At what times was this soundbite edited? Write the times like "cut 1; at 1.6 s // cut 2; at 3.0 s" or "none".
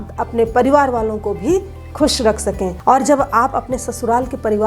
cut 1; at 2.7 s